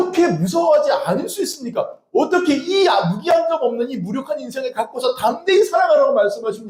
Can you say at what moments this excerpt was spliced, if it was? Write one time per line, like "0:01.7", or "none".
none